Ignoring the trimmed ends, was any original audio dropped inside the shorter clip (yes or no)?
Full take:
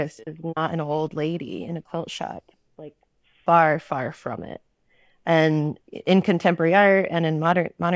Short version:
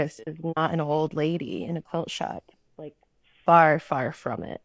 no